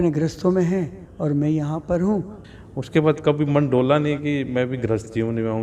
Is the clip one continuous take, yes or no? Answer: no